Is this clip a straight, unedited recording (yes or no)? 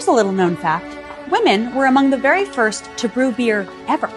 no